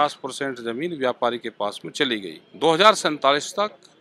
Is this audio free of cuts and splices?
no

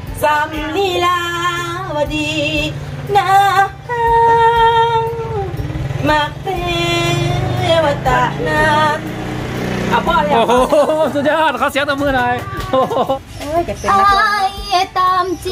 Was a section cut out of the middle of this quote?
yes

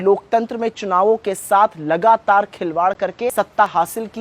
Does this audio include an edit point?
yes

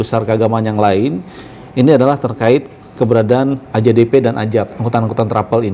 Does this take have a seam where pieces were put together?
no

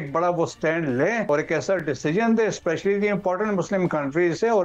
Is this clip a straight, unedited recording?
no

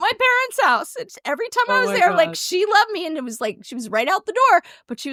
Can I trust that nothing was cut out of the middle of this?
yes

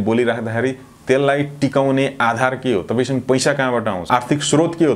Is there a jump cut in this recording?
yes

